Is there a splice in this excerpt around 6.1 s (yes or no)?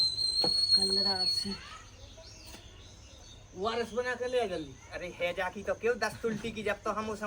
no